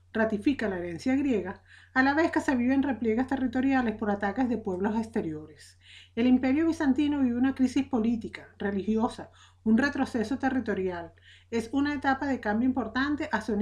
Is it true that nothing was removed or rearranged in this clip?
no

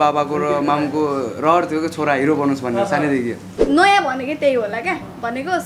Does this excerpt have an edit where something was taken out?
yes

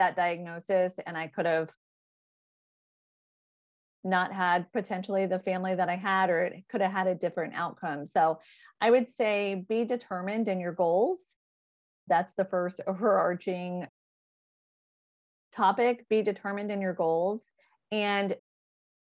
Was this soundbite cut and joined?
no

